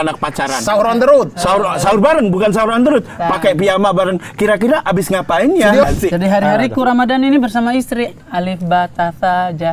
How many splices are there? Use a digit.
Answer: 1